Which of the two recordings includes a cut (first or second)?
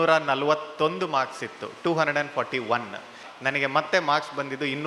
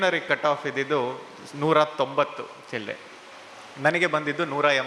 first